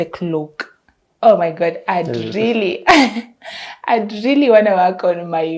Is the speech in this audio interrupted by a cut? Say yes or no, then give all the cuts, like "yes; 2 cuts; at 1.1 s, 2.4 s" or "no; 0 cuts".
no; 0 cuts